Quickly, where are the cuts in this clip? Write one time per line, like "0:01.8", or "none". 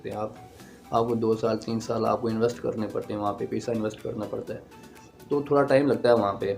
none